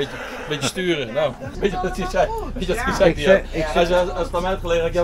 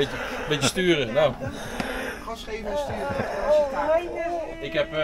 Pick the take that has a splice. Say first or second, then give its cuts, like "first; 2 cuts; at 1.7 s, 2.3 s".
first; 1 cut; at 1.5 s